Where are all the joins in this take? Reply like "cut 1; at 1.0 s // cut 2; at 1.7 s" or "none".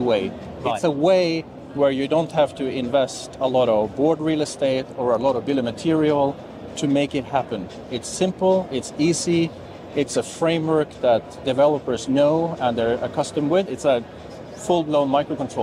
none